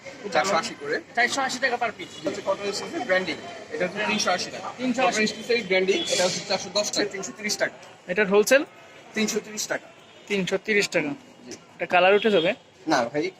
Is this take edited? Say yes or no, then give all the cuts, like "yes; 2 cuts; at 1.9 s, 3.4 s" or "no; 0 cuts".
yes; 3 cuts; at 2.3 s, 5.2 s, 7.1 s